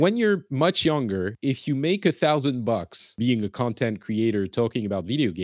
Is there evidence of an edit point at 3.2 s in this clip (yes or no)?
yes